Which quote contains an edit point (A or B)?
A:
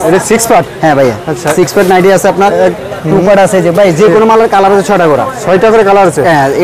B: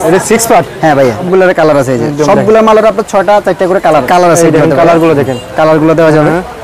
B